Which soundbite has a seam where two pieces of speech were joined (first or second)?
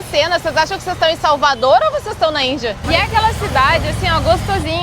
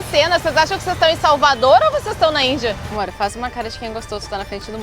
second